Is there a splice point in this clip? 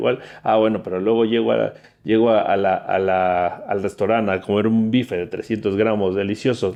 no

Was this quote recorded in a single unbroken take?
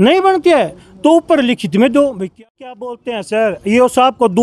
no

